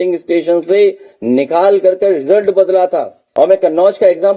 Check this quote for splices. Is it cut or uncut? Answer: cut